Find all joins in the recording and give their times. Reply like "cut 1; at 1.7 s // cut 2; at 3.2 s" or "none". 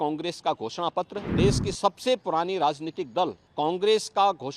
cut 1; at 1.2 s // cut 2; at 3.4 s